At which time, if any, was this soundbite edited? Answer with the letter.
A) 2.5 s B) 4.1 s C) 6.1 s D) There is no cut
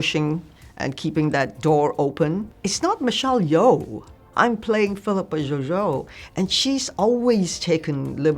A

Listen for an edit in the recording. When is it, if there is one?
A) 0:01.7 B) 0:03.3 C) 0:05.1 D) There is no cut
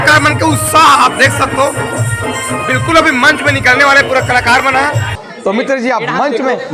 C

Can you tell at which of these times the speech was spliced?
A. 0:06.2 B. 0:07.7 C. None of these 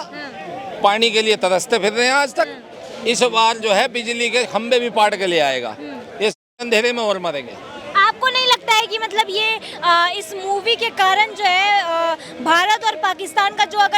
C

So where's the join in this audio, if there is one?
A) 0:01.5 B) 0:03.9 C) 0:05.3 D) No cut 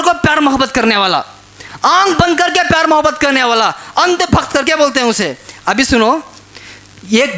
D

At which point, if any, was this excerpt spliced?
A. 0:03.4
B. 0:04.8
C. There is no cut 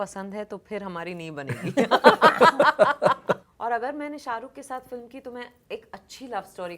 A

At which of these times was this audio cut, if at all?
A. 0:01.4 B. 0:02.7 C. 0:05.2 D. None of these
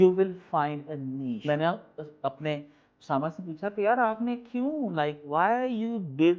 A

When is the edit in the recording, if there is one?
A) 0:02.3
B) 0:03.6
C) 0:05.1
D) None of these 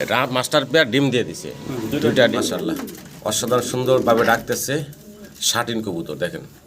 A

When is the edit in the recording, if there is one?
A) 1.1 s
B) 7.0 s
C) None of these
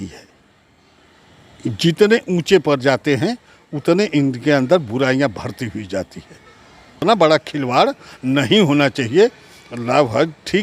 B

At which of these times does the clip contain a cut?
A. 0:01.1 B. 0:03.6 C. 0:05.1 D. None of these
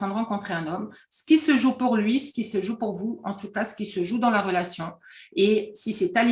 D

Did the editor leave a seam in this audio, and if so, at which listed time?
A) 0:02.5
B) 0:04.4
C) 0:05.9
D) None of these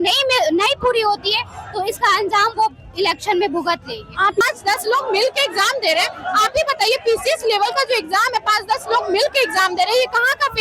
B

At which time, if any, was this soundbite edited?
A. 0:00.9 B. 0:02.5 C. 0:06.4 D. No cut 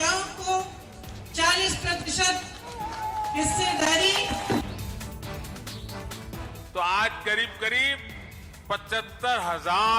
D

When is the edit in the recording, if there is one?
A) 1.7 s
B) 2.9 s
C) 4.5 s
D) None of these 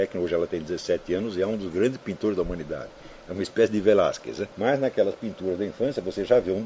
C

